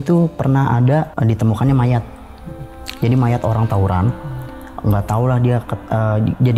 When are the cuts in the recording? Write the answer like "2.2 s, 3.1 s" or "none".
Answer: 1.1 s

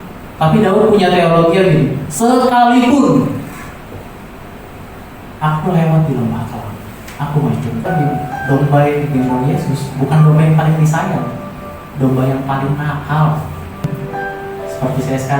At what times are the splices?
7.9 s, 13.8 s

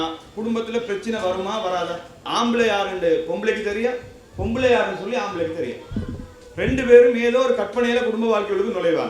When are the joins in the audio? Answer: 2.2 s

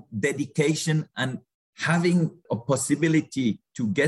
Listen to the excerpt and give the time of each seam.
1.4 s

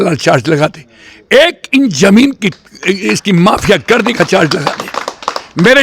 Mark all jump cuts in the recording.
none

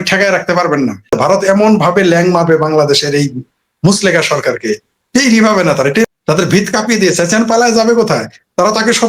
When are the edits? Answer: 1.1 s, 6.1 s

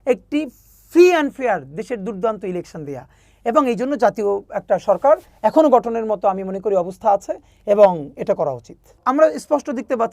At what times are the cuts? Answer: 9.0 s

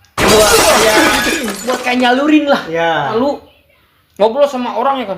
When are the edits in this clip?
3.1 s

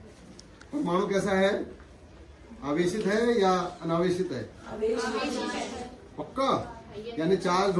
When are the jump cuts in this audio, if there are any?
none

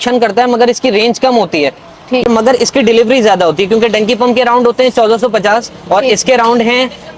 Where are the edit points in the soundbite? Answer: 2.2 s

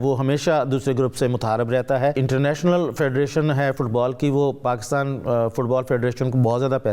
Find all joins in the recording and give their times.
2.2 s

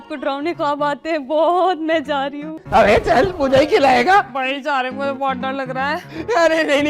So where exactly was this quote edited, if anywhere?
2.6 s

